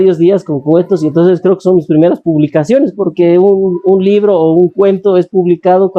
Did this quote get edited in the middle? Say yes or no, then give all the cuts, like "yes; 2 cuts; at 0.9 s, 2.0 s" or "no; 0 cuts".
no; 0 cuts